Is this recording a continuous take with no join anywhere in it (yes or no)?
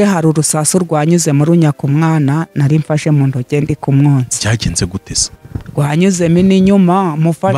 yes